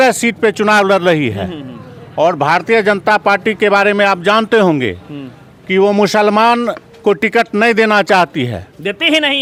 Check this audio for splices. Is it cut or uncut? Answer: uncut